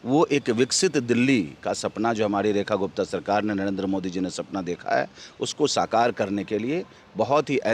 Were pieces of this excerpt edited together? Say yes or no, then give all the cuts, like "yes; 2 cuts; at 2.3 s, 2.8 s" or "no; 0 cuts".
no; 0 cuts